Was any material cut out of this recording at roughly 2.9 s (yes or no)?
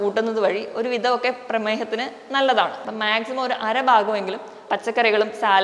yes